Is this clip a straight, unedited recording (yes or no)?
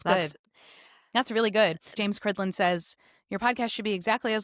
no